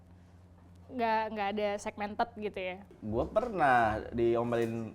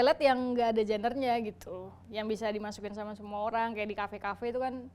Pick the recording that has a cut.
first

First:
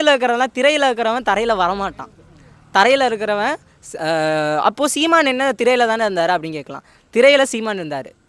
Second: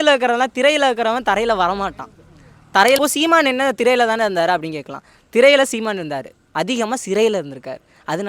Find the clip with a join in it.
second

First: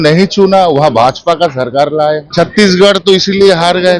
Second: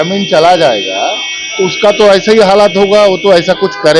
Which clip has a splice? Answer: first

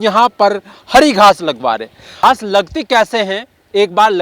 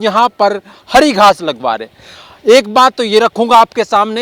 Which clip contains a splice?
first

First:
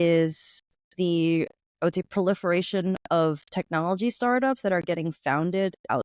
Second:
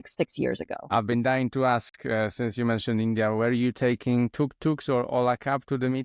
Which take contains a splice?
second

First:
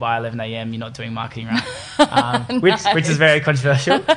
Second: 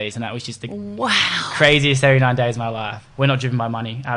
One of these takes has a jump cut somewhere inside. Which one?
second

